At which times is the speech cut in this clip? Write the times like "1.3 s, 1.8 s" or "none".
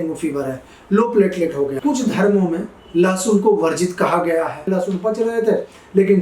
1.8 s, 4.7 s